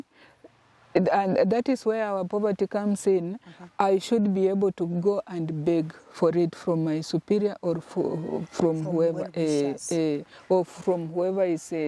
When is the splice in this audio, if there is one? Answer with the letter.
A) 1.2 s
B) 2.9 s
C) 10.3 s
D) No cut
D